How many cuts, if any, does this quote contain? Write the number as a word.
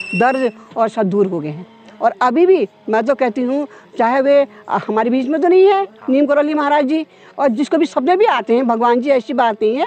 zero